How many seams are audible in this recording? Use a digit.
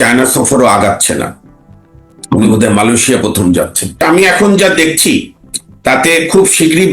1